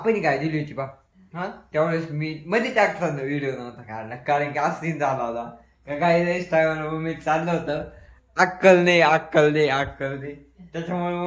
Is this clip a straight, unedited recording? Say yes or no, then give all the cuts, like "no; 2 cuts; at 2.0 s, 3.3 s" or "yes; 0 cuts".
yes; 0 cuts